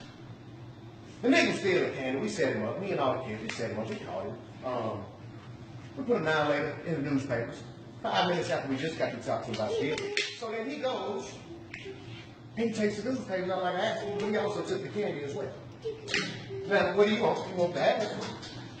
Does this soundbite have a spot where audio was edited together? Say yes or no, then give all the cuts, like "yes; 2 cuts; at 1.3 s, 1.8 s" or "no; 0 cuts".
yes; 1 cut; at 9.5 s